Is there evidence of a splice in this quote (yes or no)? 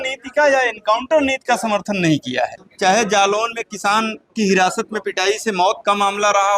yes